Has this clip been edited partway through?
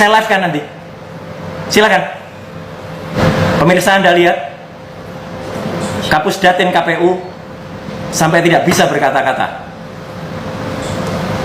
yes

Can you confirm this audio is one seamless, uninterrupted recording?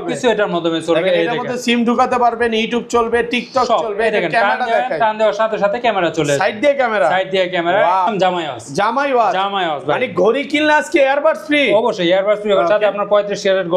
no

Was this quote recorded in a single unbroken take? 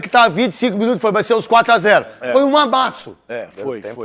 yes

